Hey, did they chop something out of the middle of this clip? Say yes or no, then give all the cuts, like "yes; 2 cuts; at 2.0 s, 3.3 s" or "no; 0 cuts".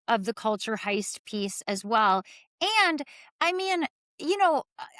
no; 0 cuts